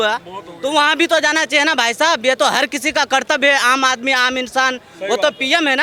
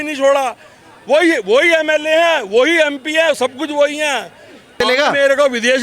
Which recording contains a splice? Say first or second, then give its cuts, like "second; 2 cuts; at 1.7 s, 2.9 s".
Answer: second; 1 cut; at 4.8 s